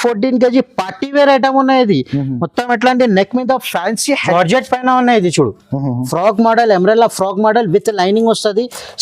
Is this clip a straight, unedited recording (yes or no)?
no